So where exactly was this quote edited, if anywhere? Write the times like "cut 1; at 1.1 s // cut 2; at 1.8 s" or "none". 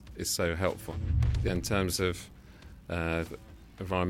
cut 1; at 1.1 s

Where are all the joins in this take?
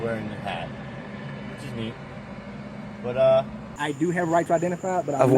cut 1; at 3.7 s

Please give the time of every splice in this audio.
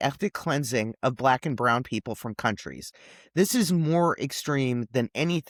none

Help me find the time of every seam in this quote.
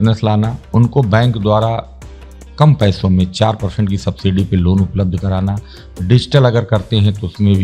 none

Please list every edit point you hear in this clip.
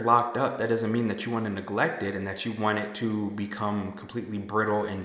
none

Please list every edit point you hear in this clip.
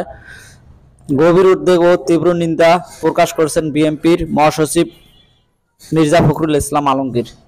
cut 1; at 3.5 s

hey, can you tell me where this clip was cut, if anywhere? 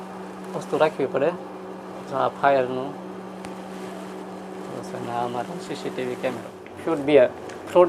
cut 1; at 6.6 s

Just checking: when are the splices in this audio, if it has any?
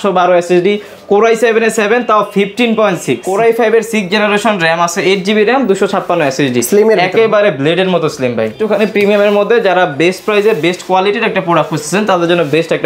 cut 1; at 3.2 s // cut 2; at 8.6 s

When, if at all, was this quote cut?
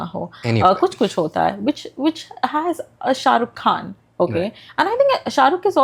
none

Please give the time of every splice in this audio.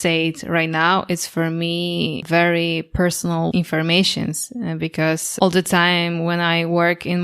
cut 1; at 2.2 s // cut 2; at 3.5 s // cut 3; at 5.3 s

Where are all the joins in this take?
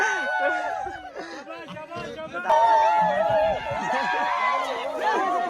cut 1; at 2.5 s

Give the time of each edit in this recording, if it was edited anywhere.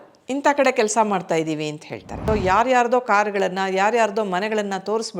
cut 1; at 2.2 s

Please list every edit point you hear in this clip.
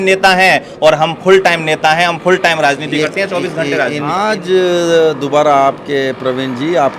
cut 1; at 4.1 s

